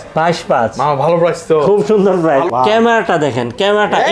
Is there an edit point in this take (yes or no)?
yes